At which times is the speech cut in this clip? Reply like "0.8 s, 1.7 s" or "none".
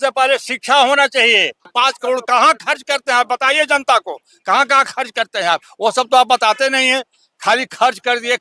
1.7 s